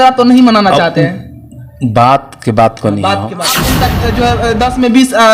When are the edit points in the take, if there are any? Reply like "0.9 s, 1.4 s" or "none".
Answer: 3.6 s